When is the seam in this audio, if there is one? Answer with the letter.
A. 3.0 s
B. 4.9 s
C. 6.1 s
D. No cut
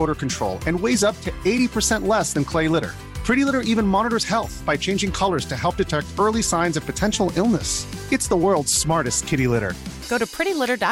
D